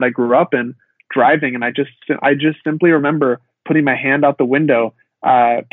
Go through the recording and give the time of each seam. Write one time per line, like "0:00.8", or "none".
none